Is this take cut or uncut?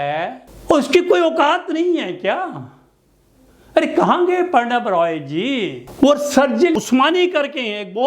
cut